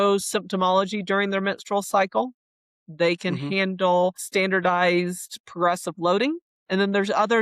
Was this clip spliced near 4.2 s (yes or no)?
yes